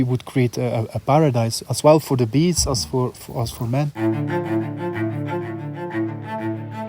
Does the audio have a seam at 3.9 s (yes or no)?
yes